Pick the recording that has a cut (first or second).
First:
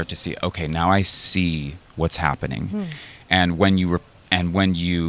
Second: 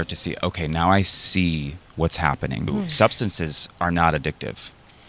second